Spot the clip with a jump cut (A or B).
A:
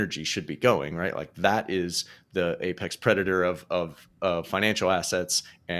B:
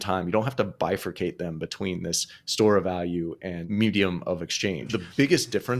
B